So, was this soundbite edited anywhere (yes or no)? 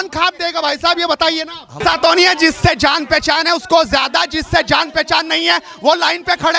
yes